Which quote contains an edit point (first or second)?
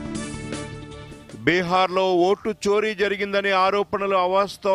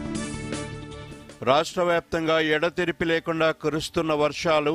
first